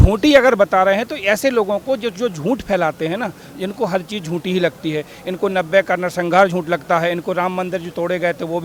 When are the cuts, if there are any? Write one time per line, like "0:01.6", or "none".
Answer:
none